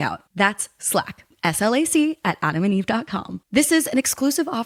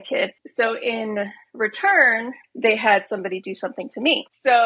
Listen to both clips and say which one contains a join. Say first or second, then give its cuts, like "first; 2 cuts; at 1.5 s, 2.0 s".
second; 1 cut; at 2.5 s